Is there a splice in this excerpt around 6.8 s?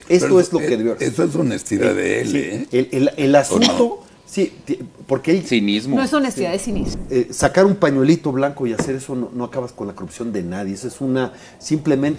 yes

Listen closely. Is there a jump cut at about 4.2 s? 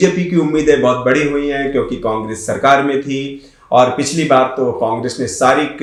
no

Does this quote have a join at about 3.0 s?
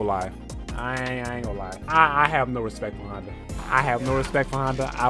no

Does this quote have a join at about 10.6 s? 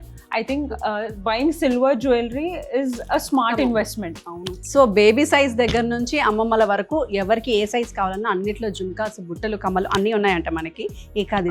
no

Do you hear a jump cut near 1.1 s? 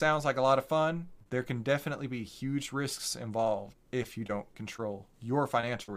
yes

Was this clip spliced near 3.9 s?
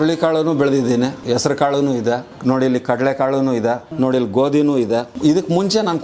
yes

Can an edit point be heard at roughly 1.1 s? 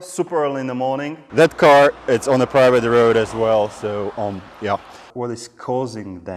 yes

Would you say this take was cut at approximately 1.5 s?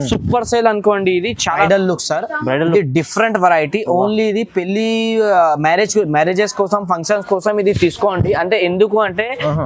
yes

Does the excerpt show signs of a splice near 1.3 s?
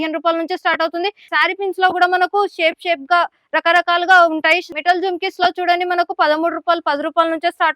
yes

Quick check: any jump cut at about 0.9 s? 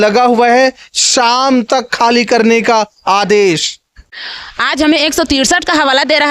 no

